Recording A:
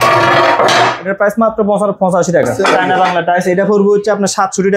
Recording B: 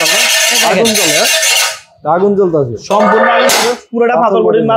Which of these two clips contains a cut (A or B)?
A